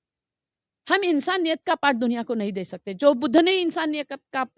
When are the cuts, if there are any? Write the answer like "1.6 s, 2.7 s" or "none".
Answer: none